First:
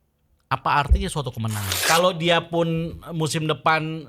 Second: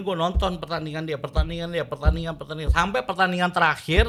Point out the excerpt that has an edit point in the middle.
first; 1 cut; at 1.7 s

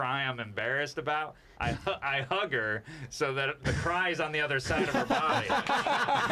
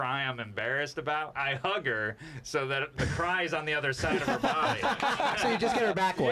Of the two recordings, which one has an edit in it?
second; 2 cuts; at 1.3 s, 5.4 s

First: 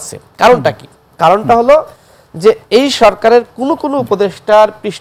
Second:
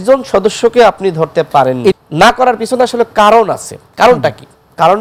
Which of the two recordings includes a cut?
second; 1 cut; at 2.0 s

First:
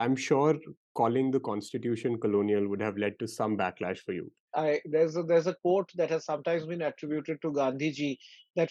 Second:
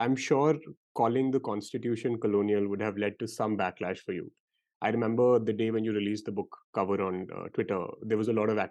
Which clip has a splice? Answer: first; 1 cut; at 4.5 s

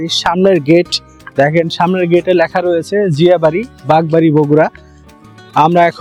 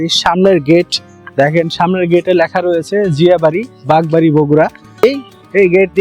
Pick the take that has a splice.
second; 1 cut; at 5.0 s

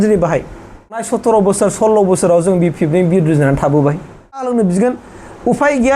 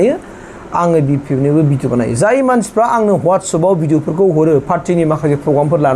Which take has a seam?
first; 2 cuts; at 1.0 s, 4.5 s

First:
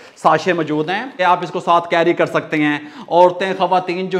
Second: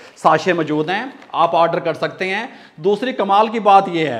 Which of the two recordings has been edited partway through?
first; 1 cut; at 1.2 s

